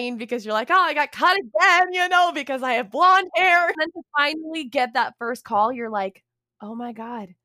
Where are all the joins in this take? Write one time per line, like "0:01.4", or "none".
0:03.8